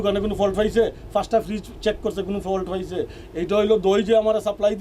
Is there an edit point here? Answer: no; 0 cuts

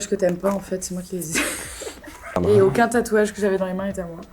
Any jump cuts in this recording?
yes; 1 cut; at 2.3 s

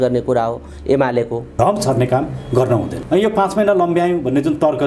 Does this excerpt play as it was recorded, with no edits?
no; 2 cuts; at 1.5 s, 3.0 s

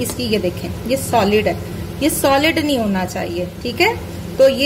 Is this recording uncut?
yes; 0 cuts

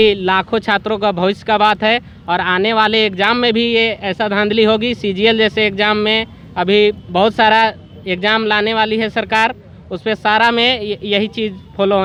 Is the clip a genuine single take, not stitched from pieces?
yes; 0 cuts

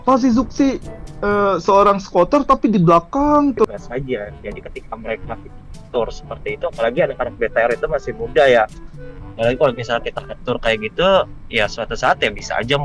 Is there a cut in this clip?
yes; 1 cut; at 3.7 s

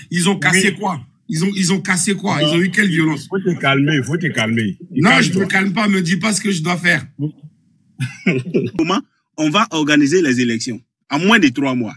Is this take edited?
yes; 1 cut; at 8.8 s

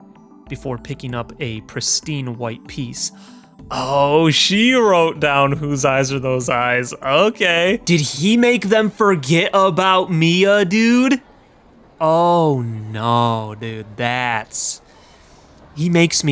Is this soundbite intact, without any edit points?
no; 1 cut; at 7.8 s

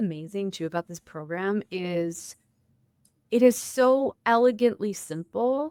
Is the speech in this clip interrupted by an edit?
no; 0 cuts

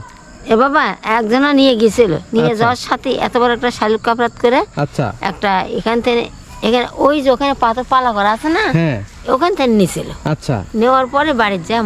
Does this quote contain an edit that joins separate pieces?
no; 0 cuts

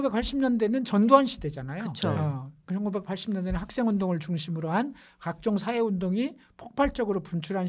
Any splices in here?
no; 0 cuts

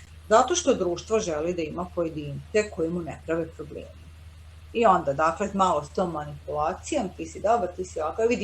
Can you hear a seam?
no; 0 cuts

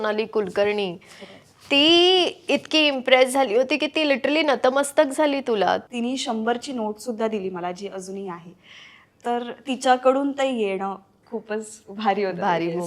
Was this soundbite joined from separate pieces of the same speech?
yes; 2 cuts; at 5.8 s, 11.1 s

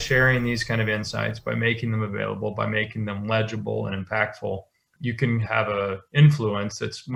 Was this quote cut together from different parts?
no; 0 cuts

